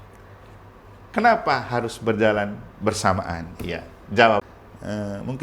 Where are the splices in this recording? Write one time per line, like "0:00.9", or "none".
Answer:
0:04.4